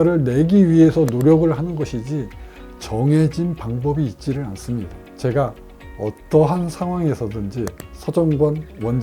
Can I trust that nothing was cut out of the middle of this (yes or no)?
no